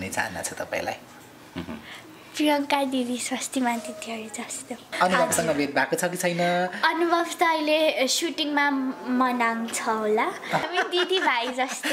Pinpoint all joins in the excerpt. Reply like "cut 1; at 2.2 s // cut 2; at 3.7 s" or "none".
cut 1; at 5.0 s // cut 2; at 10.7 s